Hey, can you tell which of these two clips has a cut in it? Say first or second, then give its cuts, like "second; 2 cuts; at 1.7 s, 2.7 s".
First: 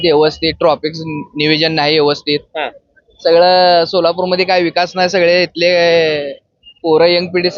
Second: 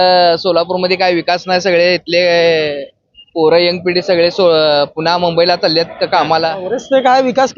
second; 1 cut; at 6.3 s